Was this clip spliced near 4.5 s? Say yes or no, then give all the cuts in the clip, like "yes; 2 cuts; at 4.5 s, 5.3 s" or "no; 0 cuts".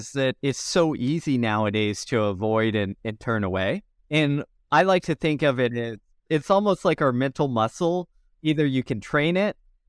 yes; 1 cut; at 4.5 s